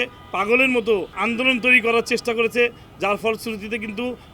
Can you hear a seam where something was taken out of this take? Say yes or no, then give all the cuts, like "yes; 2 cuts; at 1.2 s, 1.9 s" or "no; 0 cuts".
yes; 1 cut; at 1.2 s